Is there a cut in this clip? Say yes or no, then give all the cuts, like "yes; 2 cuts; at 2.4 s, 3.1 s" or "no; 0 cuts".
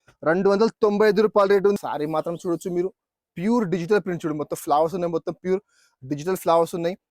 yes; 1 cut; at 1.8 s